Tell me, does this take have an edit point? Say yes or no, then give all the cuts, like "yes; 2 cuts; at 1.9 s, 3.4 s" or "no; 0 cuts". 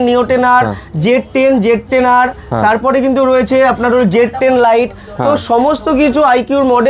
no; 0 cuts